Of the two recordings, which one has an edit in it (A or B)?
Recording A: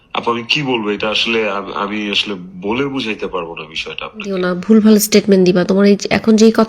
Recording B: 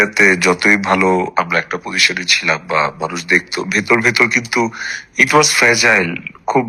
A